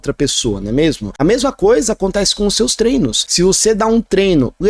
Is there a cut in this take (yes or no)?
yes